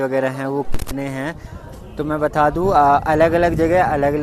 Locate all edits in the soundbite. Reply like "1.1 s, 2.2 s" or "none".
none